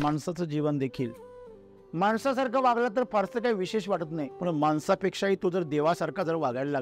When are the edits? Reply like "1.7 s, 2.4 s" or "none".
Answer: 4.3 s